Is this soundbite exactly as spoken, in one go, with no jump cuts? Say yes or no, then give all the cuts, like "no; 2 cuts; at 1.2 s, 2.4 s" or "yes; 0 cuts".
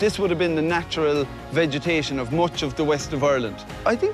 yes; 0 cuts